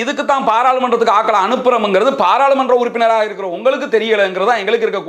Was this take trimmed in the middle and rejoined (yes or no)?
no